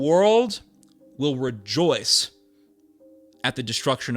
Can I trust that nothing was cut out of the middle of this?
yes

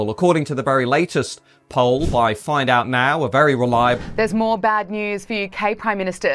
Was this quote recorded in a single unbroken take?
no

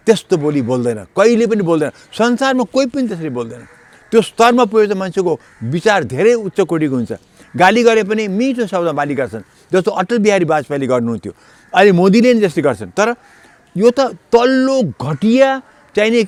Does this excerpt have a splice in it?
no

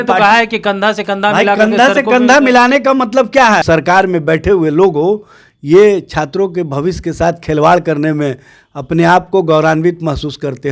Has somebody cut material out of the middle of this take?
yes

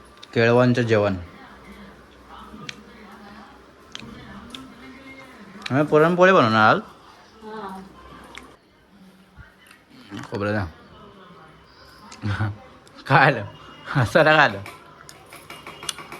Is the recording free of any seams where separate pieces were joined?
yes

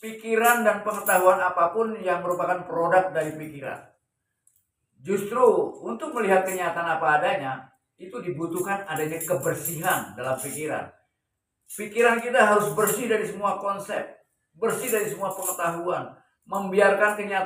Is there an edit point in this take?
no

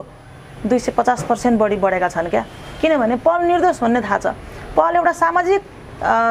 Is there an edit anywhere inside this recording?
no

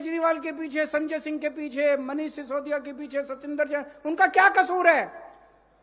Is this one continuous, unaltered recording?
yes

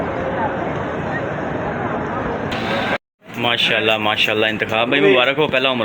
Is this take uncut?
no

